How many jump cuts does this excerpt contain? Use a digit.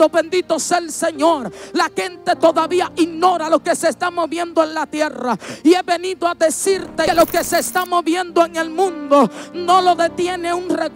1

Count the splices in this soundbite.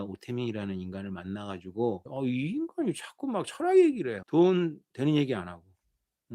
1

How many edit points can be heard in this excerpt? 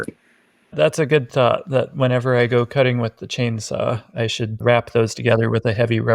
2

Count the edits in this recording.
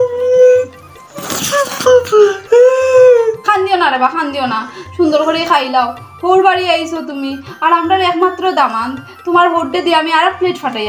0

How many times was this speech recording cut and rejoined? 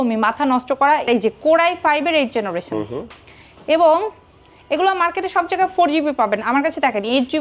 1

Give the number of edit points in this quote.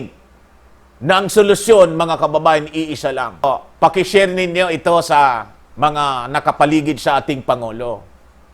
1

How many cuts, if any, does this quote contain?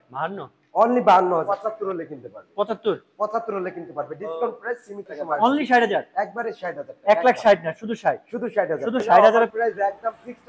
3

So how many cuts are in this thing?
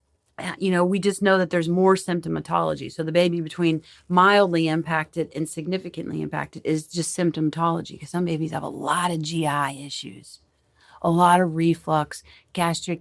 0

